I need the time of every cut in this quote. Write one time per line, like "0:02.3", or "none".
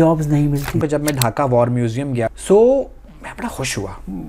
0:00.8
0:02.3